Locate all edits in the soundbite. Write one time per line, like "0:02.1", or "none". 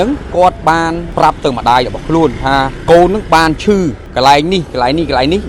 0:01.1
0:02.7
0:04.0